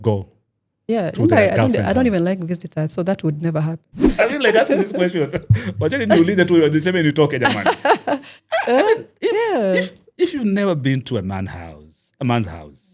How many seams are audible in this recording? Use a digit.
1